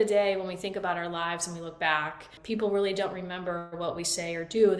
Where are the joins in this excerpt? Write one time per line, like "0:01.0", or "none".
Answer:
0:02.3